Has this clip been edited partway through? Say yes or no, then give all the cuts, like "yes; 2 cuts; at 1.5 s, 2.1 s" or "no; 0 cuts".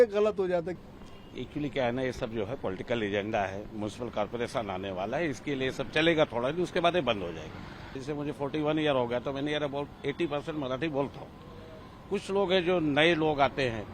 yes; 2 cuts; at 0.9 s, 8.0 s